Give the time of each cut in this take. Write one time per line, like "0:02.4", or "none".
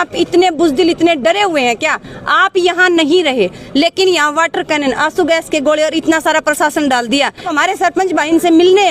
0:07.5